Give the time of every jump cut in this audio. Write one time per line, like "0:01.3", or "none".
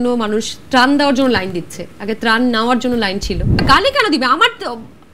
0:03.6